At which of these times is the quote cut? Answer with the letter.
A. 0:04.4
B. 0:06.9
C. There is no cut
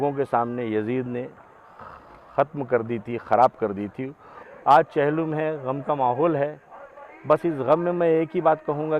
A